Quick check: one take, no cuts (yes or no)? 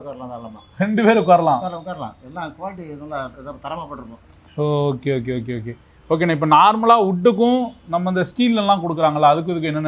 yes